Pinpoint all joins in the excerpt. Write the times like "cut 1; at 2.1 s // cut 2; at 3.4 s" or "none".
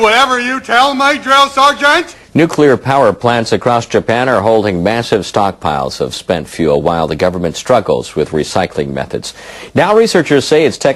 none